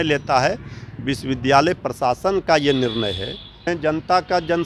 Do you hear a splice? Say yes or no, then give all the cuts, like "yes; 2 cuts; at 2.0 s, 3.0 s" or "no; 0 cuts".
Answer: yes; 1 cut; at 3.7 s